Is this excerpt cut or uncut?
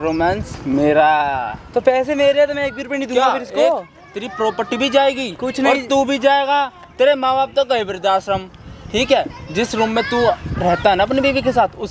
uncut